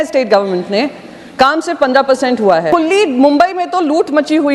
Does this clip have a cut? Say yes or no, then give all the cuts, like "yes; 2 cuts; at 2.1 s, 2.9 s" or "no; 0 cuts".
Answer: yes; 1 cut; at 2.7 s